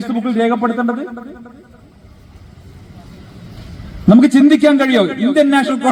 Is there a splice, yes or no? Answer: no